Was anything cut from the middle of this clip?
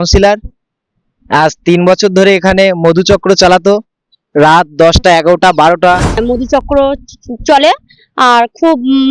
yes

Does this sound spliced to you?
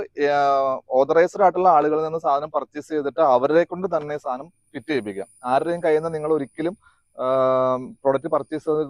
no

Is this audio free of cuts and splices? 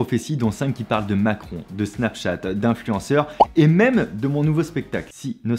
yes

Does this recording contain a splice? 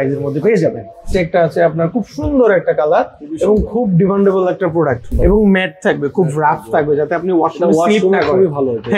yes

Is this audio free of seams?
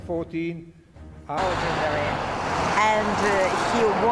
yes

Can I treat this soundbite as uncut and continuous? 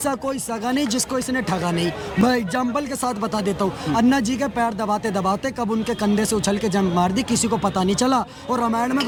yes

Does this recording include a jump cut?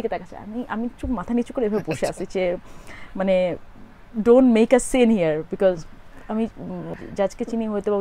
yes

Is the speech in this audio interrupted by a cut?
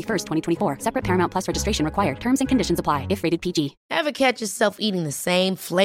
yes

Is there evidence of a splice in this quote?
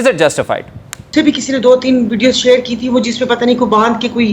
yes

